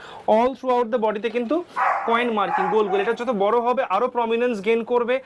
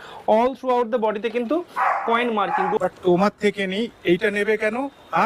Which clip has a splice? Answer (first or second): second